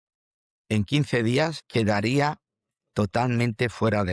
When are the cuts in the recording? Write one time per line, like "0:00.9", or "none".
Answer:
0:01.6

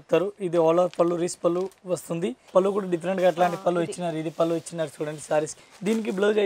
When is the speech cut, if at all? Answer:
0:02.4
0:05.5

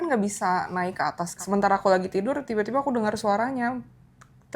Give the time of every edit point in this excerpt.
0:01.3

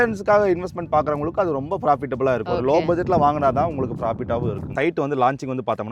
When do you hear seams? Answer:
0:02.4
0:04.7

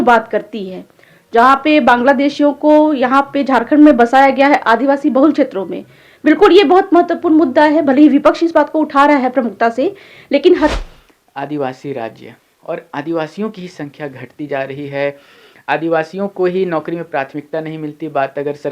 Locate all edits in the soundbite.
0:10.7

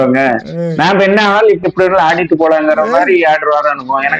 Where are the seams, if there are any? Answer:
0:01.6

